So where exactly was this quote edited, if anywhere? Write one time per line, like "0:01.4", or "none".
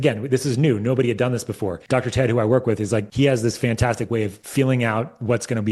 0:01.8
0:03.1
0:04.4